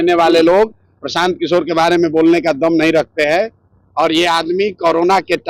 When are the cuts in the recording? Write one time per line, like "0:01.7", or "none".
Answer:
none